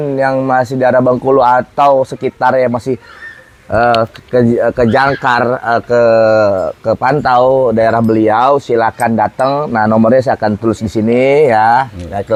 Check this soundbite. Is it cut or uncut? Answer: uncut